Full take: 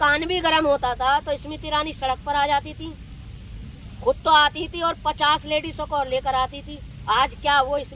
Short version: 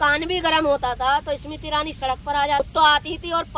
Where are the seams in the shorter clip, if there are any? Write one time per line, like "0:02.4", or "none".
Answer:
0:02.6